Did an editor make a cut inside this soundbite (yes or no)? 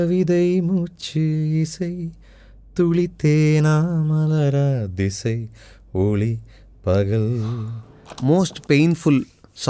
yes